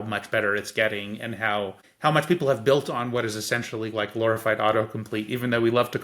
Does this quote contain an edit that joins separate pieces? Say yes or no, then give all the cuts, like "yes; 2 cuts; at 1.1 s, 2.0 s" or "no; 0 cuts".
yes; 1 cut; at 1.8 s